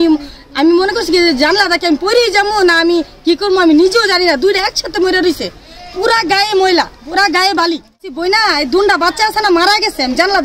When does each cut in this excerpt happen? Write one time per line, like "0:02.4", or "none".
0:08.1

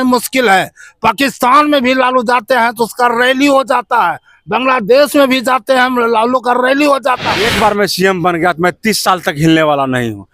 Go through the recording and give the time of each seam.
0:07.4

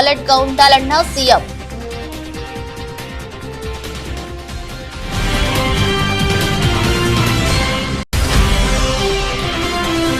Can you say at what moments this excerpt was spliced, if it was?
0:01.4
0:06.9

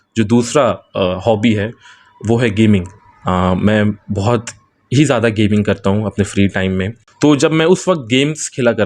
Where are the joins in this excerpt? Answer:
0:07.0

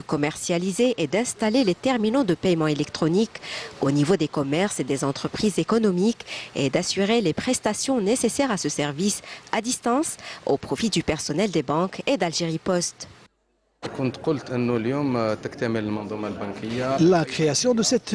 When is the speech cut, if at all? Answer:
0:11.8

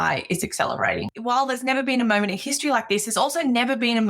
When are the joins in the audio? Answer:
0:01.1

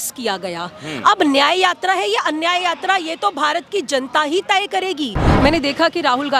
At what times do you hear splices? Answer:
0:05.2

